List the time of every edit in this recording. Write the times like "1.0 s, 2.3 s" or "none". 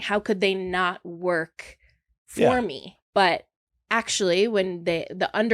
2.9 s